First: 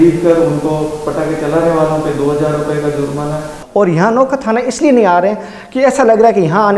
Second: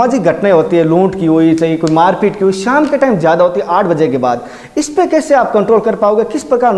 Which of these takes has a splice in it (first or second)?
first